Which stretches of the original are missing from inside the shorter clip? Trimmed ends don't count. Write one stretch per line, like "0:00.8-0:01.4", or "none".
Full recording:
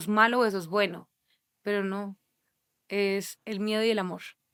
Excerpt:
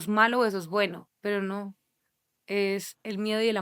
0:01.1-0:01.5